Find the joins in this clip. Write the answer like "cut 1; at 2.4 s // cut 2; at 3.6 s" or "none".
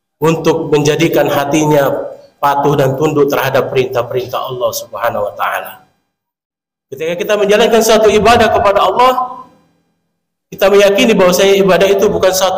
cut 1; at 7.1 s

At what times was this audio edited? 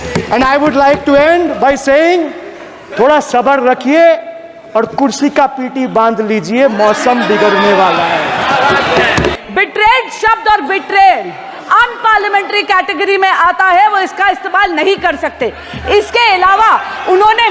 cut 1; at 9.4 s

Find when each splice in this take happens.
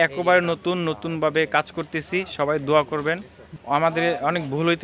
cut 1; at 3.5 s

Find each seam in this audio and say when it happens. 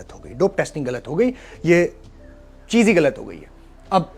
none

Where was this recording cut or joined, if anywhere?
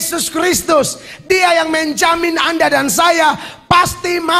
none

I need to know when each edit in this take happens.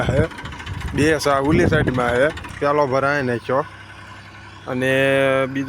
cut 1; at 2.5 s

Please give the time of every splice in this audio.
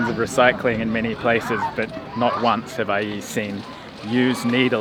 none

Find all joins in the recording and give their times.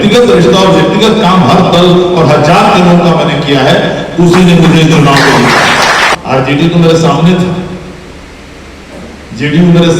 cut 1; at 6.1 s

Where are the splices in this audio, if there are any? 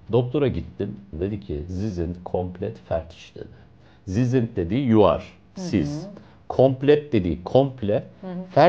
cut 1; at 1.1 s

